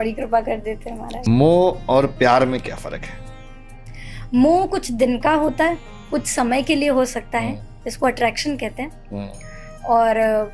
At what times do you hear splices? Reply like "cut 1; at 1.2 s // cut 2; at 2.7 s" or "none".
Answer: cut 1; at 1.2 s